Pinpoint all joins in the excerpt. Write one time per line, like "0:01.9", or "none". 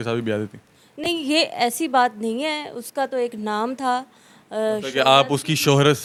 none